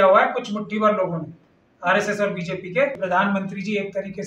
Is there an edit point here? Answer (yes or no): yes